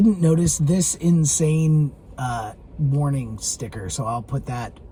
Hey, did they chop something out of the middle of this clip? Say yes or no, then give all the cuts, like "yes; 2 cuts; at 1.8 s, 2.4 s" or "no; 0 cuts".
no; 0 cuts